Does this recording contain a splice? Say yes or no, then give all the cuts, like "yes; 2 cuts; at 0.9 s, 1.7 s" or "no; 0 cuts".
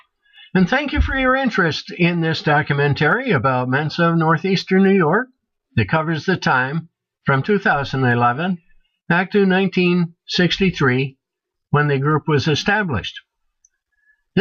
no; 0 cuts